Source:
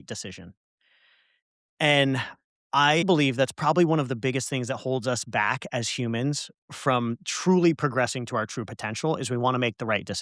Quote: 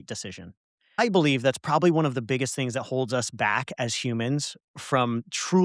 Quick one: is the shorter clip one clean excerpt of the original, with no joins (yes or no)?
no